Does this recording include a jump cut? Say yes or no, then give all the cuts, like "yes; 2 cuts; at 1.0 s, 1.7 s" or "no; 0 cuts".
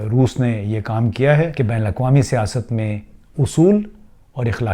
yes; 1 cut; at 1.5 s